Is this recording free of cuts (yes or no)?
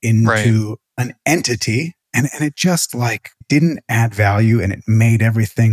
no